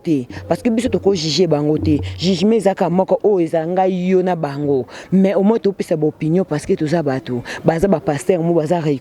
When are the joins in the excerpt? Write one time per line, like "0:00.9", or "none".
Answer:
none

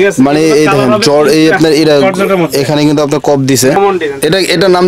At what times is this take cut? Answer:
0:03.8

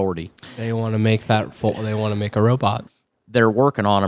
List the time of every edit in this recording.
0:02.8

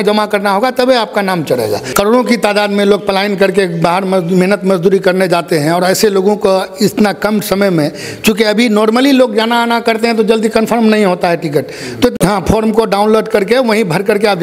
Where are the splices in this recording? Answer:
0:01.8
0:12.1

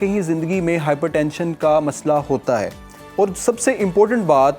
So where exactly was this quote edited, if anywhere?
none

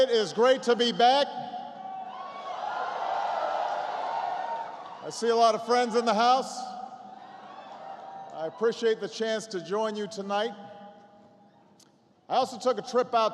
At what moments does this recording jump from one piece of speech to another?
0:04.8

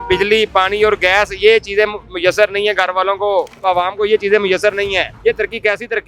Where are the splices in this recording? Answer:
0:03.5
0:05.1

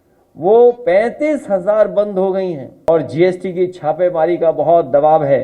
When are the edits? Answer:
0:02.9

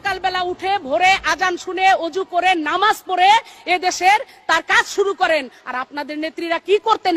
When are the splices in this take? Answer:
none

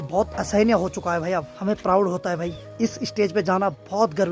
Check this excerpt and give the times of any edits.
0:01.5
0:02.6

